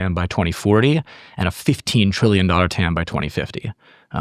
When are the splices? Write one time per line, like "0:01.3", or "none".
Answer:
none